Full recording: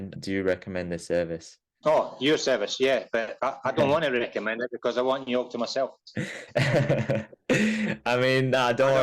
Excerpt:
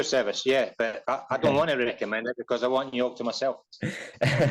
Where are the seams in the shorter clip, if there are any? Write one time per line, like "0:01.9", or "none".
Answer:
none